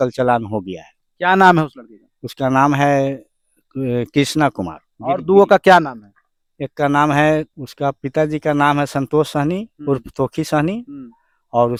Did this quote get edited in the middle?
no; 0 cuts

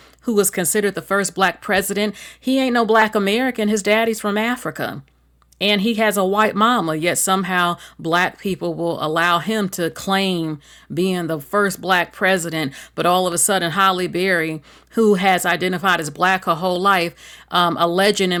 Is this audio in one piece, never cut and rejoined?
yes; 0 cuts

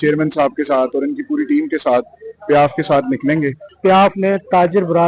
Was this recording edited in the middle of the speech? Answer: yes; 1 cut; at 3.7 s

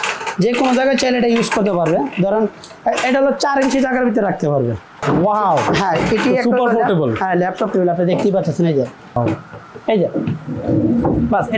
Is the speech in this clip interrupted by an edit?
yes; 2 cuts; at 4.9 s, 9.2 s

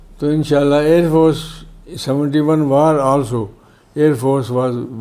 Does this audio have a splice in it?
no; 0 cuts

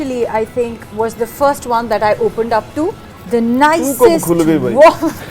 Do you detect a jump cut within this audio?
yes; 1 cut; at 3.1 s

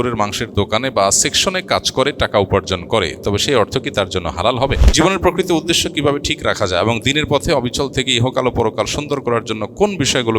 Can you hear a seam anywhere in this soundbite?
yes; 1 cut; at 4.8 s

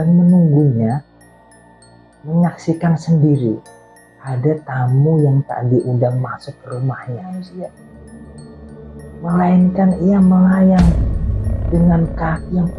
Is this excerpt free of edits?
no; 1 cut; at 7.2 s

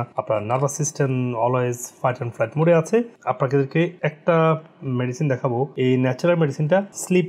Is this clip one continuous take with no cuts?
yes; 0 cuts

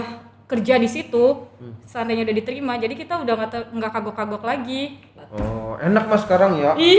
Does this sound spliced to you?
yes; 1 cut; at 5.1 s

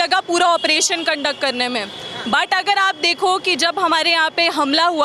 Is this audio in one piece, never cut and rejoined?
yes; 0 cuts

